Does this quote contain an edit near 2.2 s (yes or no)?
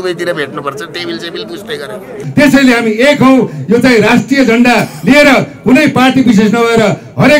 yes